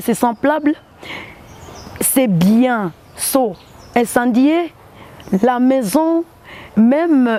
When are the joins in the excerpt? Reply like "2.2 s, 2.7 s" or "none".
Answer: none